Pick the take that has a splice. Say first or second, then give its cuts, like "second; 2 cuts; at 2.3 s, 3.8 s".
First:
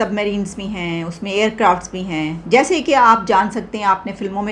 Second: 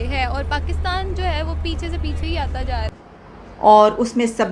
second; 1 cut; at 2.9 s